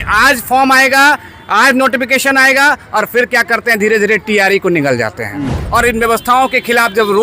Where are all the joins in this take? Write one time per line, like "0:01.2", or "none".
0:05.6